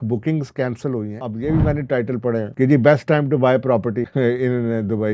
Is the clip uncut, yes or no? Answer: no